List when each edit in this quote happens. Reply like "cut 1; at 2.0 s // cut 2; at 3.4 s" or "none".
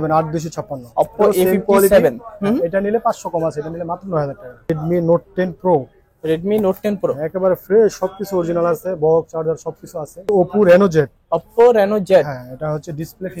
cut 1; at 4.7 s // cut 2; at 10.3 s

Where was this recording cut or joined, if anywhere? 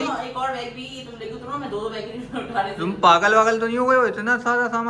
none

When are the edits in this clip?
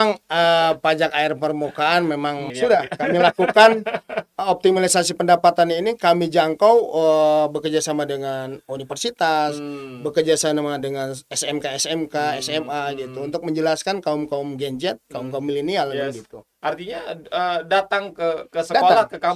cut 1; at 2.5 s

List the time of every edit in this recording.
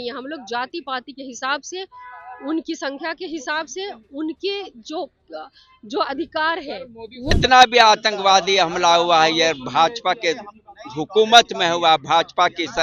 cut 1; at 7.3 s

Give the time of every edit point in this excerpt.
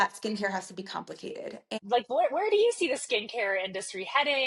cut 1; at 1.5 s

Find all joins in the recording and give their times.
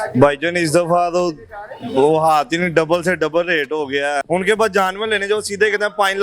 cut 1; at 4.2 s

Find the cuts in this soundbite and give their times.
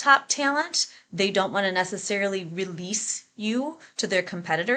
none

